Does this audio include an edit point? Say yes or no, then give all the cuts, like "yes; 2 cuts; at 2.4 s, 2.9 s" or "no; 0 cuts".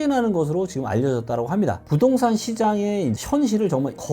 yes; 1 cut; at 1.8 s